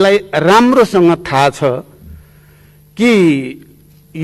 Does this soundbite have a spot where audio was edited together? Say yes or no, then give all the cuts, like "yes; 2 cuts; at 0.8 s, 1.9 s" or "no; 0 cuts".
no; 0 cuts